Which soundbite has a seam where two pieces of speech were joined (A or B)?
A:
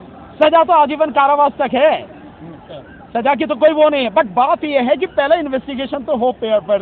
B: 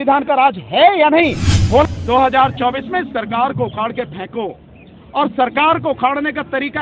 B